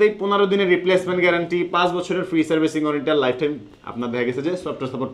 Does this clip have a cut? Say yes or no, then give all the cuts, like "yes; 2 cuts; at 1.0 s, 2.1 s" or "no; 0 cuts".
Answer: no; 0 cuts